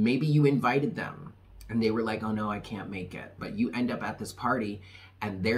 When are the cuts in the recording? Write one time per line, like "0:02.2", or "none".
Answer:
0:03.3